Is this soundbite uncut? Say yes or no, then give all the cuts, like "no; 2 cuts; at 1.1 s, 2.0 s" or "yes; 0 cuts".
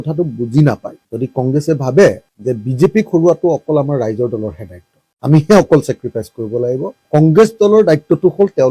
yes; 0 cuts